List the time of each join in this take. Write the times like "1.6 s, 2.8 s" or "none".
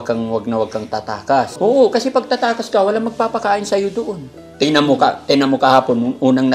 1.5 s